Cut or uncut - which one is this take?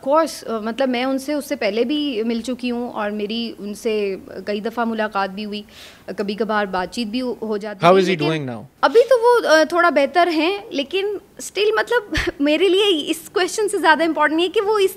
uncut